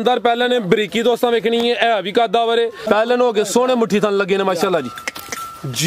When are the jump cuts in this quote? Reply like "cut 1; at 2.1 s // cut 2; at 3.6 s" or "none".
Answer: cut 1; at 2.8 s